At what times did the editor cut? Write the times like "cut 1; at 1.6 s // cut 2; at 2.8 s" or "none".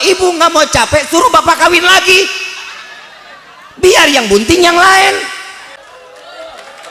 cut 1; at 5.8 s